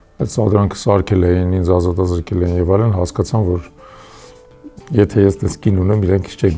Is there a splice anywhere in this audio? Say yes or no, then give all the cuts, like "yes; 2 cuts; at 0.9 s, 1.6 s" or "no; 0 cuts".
no; 0 cuts